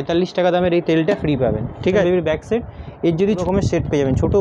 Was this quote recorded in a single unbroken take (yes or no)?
no